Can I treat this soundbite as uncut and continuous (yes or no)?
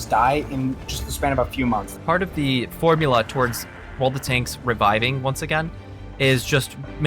no